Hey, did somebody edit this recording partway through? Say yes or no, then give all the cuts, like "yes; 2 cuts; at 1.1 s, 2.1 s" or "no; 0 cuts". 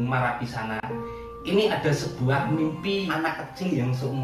yes; 1 cut; at 3.1 s